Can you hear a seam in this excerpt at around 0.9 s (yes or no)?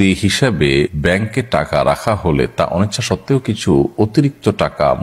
yes